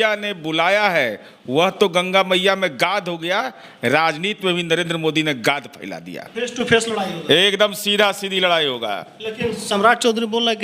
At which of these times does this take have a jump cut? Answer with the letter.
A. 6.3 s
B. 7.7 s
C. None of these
A